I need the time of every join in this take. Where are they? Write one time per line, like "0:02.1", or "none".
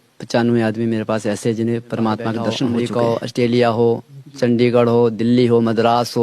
0:02.7